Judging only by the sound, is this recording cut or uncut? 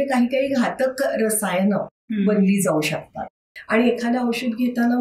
cut